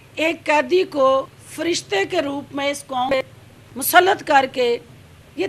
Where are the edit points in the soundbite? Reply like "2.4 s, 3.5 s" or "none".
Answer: 1.4 s, 3.2 s